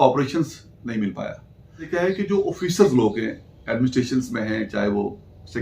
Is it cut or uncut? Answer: cut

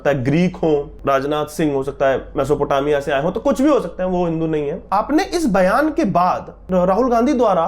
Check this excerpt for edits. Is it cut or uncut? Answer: cut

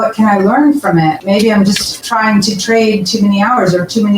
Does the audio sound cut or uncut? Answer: cut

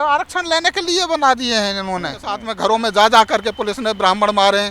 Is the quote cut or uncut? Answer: cut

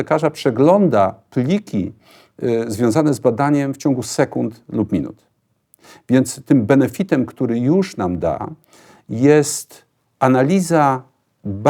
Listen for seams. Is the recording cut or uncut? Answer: uncut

